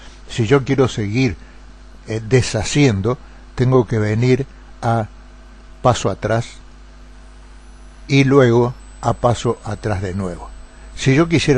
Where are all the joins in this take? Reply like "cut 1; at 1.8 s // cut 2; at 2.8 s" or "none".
cut 1; at 10.1 s